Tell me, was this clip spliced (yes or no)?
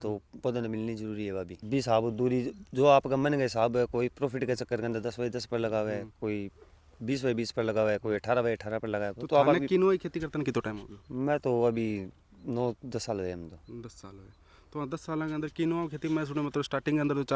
no